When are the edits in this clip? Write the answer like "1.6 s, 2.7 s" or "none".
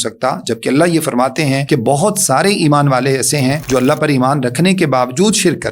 1.6 s, 3.6 s